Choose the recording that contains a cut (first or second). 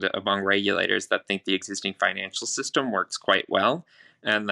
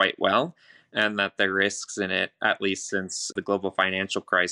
second